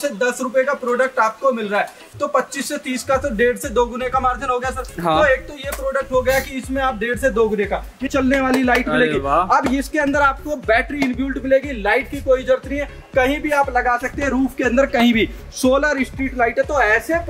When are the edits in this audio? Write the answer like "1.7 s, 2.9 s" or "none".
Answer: 8.0 s